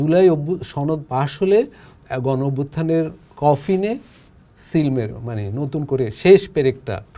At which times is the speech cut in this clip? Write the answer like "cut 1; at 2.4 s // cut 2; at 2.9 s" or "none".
none